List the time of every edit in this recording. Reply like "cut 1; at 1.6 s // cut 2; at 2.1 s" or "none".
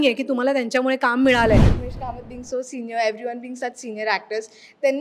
cut 1; at 1.7 s